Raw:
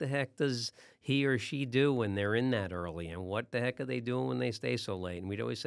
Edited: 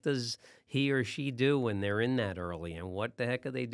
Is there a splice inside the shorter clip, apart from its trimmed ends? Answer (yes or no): no